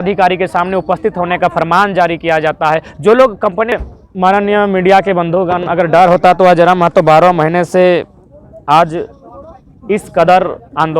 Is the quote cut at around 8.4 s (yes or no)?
no